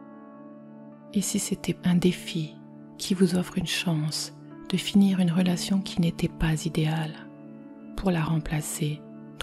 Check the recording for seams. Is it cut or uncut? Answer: uncut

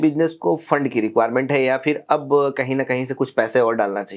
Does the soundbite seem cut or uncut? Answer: uncut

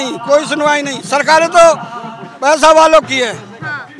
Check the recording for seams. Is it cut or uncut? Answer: uncut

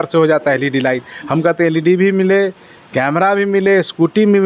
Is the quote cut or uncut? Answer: uncut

